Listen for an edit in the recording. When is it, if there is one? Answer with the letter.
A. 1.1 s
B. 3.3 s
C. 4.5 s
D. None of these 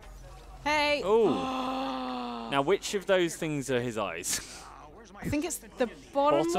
D